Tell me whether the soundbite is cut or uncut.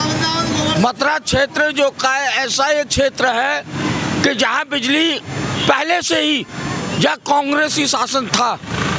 uncut